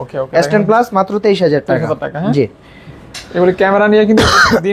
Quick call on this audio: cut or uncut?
uncut